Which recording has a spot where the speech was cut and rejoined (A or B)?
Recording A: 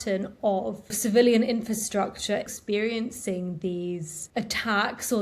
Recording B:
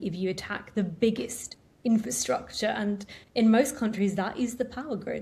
A